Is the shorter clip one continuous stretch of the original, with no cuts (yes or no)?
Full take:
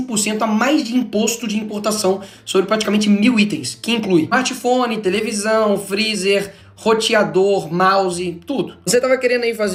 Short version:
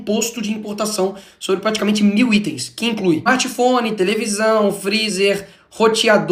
yes